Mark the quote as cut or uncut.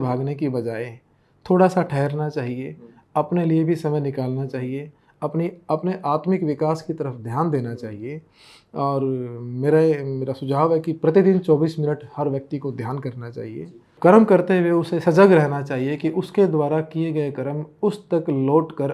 uncut